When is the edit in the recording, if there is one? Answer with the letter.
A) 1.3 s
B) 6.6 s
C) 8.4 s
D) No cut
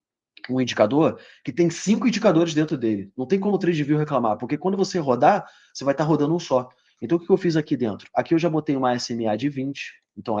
D